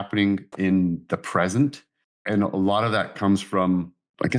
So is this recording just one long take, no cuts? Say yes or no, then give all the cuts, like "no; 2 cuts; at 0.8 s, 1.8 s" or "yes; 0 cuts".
yes; 0 cuts